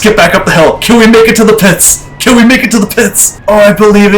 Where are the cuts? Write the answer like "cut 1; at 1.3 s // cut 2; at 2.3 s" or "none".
cut 1; at 3.3 s